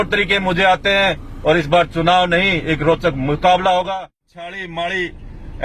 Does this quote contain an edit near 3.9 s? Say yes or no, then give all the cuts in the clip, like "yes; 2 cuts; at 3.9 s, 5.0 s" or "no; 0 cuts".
yes; 1 cut; at 3.9 s